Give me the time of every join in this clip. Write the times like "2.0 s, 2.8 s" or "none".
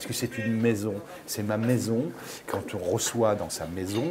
2.4 s